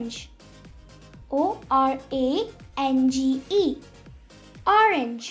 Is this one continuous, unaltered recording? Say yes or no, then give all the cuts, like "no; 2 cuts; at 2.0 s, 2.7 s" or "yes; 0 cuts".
yes; 0 cuts